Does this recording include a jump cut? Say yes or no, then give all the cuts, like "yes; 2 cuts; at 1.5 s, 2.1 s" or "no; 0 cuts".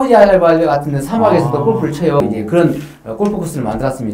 yes; 1 cut; at 2.2 s